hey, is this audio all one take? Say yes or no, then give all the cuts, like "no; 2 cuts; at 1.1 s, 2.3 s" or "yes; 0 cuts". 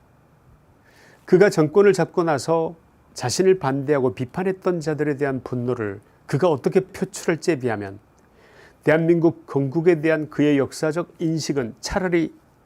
yes; 0 cuts